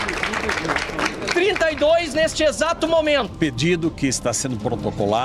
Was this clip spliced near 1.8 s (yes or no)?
no